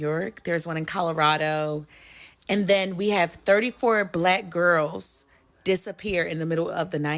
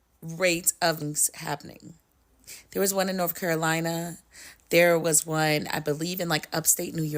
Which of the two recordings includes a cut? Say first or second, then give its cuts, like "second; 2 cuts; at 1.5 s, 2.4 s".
second; 1 cut; at 1.0 s